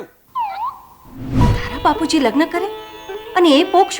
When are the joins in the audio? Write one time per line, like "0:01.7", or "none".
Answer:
0:01.4